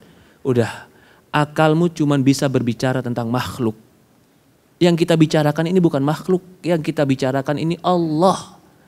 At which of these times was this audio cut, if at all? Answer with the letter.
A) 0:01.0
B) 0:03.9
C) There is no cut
C